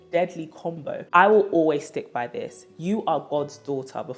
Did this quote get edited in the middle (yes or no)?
yes